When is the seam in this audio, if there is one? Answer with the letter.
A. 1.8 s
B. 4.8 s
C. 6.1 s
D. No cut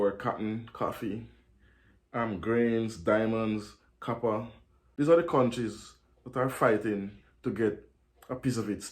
B